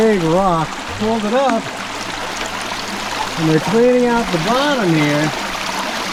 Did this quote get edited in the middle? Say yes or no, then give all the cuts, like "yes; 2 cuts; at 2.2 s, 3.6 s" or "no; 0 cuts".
no; 0 cuts